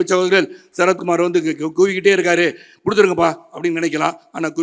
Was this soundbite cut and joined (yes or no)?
no